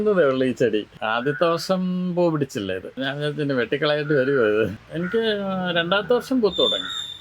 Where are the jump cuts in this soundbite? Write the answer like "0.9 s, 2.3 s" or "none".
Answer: 1.0 s, 2.9 s, 4.8 s